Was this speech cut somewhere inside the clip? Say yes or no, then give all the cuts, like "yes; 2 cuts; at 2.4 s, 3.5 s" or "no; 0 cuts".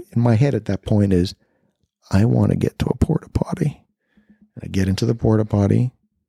yes; 1 cut; at 3.8 s